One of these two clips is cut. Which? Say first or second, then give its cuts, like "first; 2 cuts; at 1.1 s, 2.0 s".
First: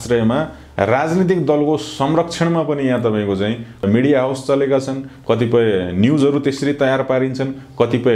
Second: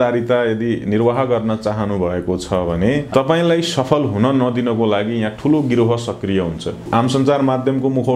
second; 2 cuts; at 3.1 s, 6.9 s